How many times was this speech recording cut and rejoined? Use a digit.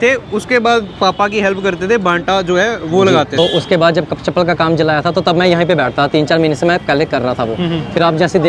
0